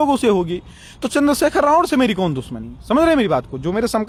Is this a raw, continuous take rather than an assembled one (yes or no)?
yes